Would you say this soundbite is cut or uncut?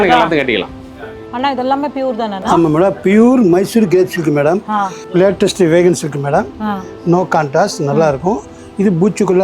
cut